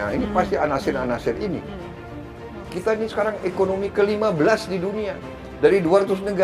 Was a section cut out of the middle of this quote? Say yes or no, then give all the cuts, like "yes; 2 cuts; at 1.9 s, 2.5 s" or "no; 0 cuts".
yes; 1 cut; at 2.2 s